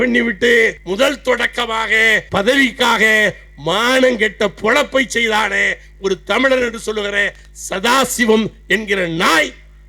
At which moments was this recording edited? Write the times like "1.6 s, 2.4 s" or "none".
0.8 s, 2.2 s

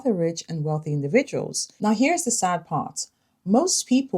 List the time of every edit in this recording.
1.6 s

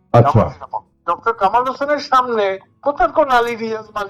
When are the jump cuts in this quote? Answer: 1.0 s

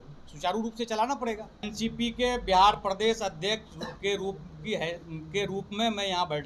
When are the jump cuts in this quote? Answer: 1.7 s

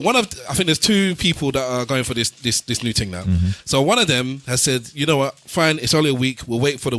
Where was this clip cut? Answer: none

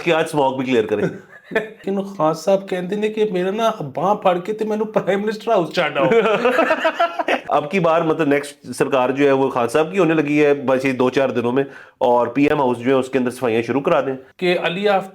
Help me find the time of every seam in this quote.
1.8 s, 7.4 s, 14.2 s

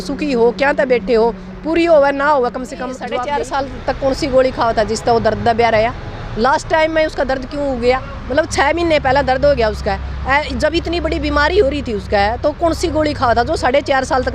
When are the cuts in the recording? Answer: 3.0 s

